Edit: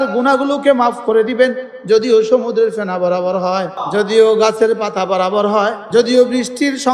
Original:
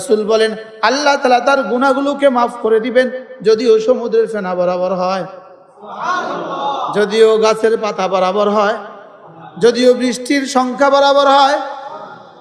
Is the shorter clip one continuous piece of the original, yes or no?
no